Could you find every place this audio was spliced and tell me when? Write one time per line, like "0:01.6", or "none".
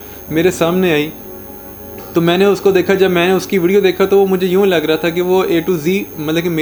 none